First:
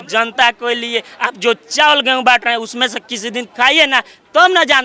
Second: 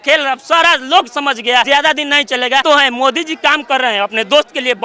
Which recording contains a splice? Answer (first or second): second